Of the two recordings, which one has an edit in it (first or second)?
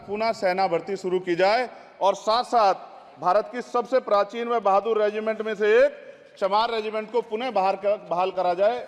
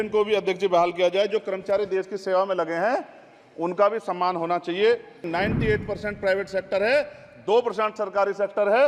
second